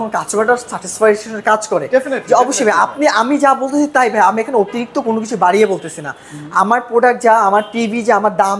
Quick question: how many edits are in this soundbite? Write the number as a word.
zero